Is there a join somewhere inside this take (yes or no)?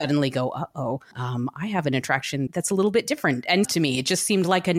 yes